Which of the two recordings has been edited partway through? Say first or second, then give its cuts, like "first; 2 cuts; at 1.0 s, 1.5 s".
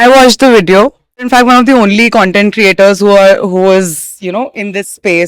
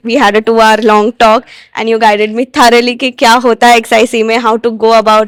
first; 1 cut; at 1.3 s